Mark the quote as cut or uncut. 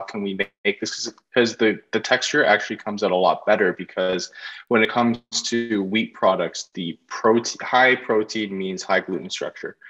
cut